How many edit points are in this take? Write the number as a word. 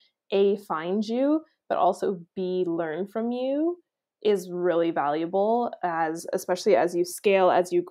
zero